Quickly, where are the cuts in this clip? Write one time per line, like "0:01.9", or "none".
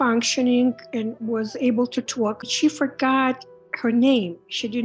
0:02.5